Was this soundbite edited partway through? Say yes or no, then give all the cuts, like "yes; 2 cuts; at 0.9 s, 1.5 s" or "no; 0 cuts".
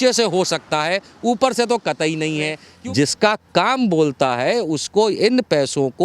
yes; 1 cut; at 2.6 s